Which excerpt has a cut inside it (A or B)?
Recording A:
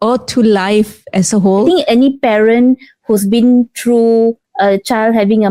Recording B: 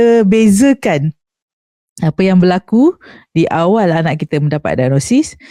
A